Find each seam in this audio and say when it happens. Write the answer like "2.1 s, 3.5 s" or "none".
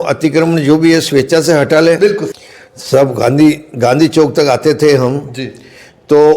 2.4 s